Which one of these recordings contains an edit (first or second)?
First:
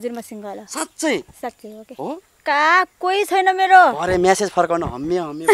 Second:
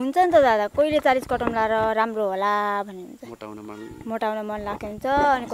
first